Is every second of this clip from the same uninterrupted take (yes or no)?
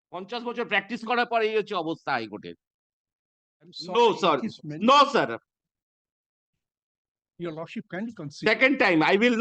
no